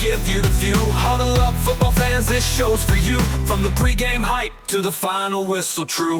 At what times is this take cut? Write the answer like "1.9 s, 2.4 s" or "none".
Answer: none